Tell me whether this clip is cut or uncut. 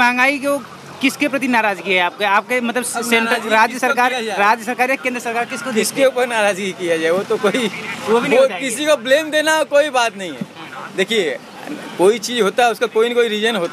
uncut